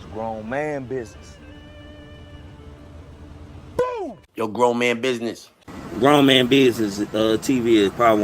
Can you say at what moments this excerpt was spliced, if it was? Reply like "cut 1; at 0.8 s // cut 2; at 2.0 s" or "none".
cut 1; at 5.5 s